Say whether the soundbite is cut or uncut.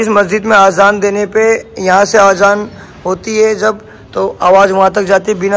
uncut